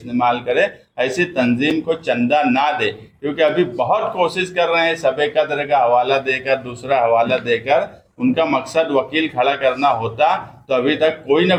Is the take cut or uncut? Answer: uncut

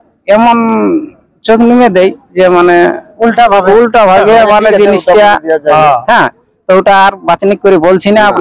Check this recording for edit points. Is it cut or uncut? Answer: uncut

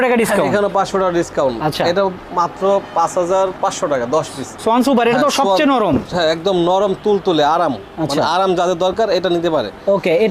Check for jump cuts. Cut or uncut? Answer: uncut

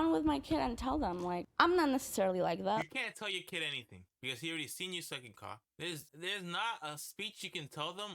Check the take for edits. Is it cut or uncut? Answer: cut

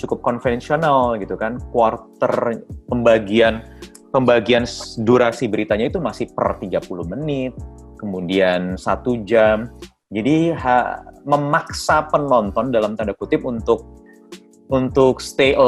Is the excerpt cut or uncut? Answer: uncut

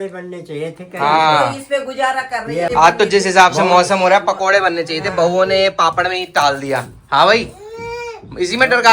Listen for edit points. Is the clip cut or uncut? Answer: cut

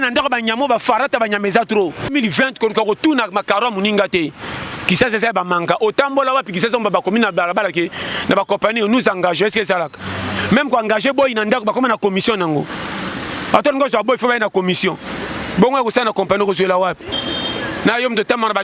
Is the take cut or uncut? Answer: cut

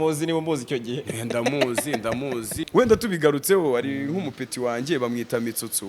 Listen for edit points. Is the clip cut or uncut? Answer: cut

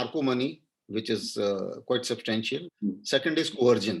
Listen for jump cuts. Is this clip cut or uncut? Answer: cut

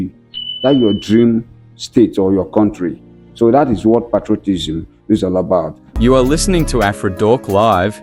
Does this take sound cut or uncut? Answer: cut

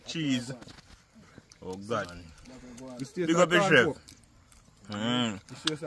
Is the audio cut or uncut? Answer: cut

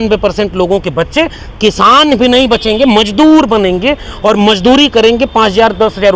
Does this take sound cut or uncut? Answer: uncut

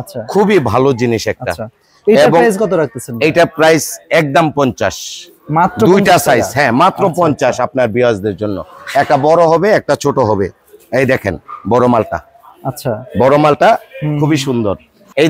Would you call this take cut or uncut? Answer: uncut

